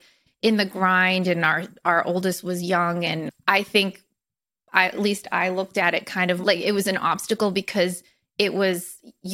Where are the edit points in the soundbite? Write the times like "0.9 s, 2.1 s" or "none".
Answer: 3.3 s, 6.4 s